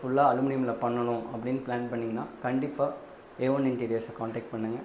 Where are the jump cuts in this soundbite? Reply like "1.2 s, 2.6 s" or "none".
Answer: none